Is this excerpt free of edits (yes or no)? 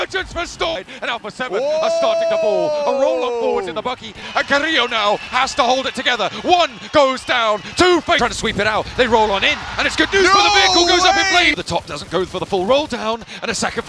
no